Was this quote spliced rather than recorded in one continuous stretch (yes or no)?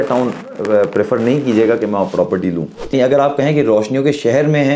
yes